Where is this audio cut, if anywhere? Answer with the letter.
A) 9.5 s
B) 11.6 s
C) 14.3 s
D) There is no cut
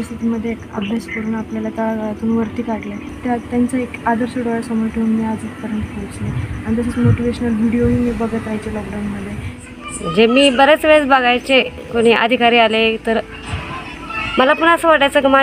A